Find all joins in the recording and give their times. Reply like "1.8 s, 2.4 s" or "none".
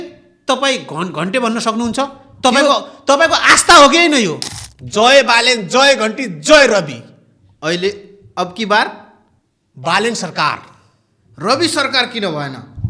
4.4 s